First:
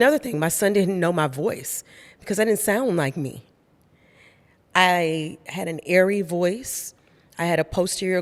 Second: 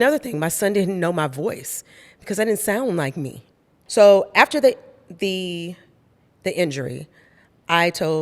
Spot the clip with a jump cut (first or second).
second